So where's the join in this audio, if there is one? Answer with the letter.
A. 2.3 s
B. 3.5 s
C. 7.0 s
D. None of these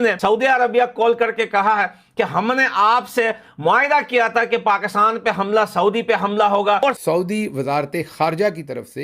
C